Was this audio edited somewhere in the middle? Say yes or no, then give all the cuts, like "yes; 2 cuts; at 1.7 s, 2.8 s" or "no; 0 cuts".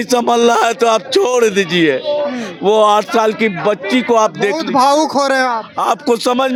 no; 0 cuts